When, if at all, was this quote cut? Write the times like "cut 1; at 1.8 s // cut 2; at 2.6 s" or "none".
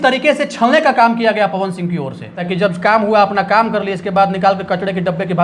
cut 1; at 2.4 s